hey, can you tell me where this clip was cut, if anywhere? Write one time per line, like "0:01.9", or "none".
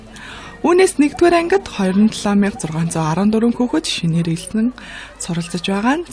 0:01.3